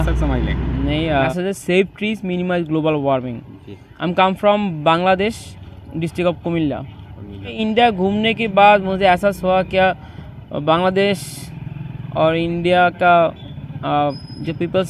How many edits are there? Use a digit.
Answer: 2